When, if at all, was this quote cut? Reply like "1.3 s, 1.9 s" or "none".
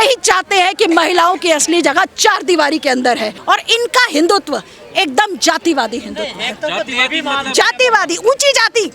3.3 s